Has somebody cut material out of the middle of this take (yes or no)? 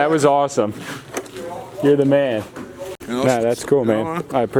no